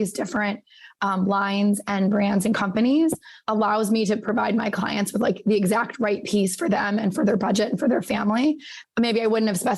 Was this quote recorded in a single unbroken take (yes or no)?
no